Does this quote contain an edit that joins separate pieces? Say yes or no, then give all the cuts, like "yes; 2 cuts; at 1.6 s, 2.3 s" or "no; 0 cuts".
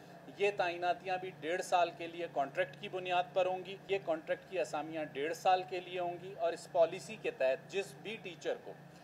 yes; 1 cut; at 3.9 s